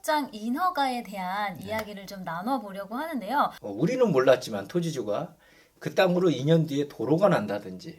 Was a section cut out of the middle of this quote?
yes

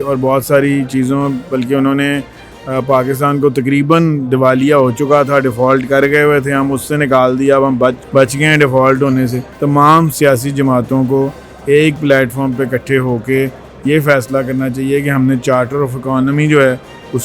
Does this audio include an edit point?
yes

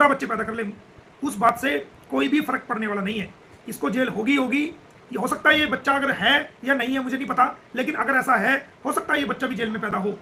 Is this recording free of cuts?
yes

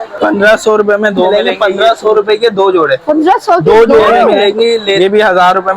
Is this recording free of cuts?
no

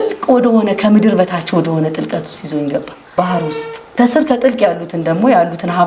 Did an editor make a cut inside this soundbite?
no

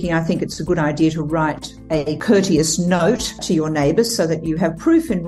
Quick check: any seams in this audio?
no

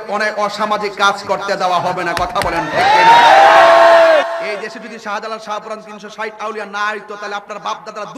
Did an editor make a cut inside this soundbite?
yes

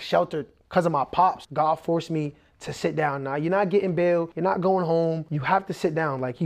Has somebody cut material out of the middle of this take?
yes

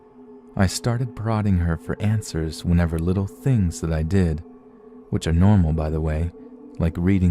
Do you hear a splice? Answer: yes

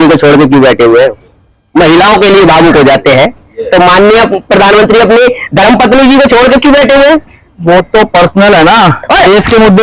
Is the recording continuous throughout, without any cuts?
yes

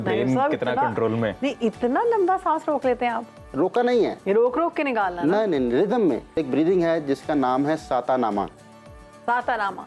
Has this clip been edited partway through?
yes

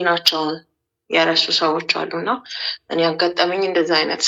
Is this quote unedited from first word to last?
yes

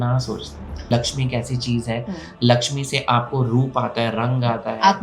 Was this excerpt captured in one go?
no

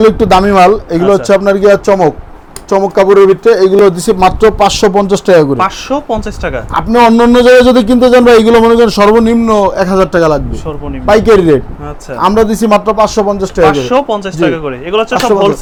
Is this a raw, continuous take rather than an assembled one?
yes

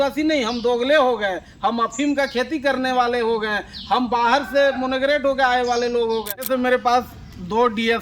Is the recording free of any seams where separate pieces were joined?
no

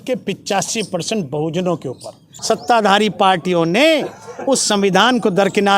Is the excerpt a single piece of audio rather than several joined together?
no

